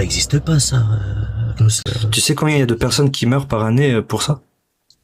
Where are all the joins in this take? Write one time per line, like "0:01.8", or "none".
0:01.8